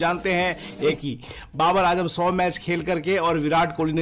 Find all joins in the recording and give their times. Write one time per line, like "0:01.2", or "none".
0:01.0